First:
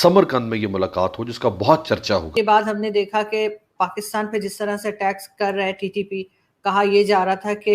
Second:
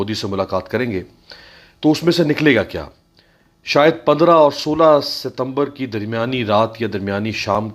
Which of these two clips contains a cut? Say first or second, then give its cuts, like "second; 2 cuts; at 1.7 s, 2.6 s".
first; 1 cut; at 2.3 s